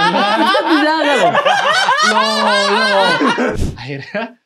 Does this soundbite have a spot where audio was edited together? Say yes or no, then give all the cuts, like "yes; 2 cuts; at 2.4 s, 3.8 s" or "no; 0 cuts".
yes; 1 cut; at 3.5 s